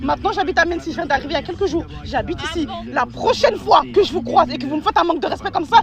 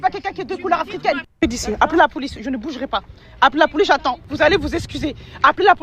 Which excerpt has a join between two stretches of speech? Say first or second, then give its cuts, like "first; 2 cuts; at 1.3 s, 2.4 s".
second; 2 cuts; at 1.3 s, 4.2 s